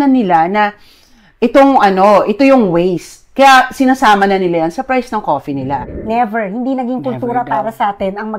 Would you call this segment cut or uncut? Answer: cut